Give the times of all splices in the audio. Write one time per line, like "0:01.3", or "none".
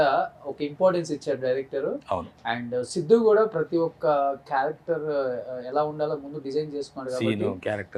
none